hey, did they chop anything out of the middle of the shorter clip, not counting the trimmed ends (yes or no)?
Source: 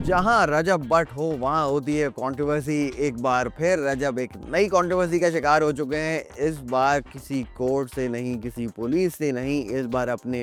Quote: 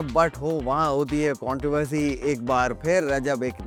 no